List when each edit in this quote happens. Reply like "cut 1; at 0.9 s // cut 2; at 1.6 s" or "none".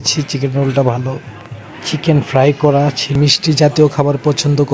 cut 1; at 3.2 s